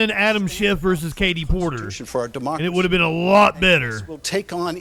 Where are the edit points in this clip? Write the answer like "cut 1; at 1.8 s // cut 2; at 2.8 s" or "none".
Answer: none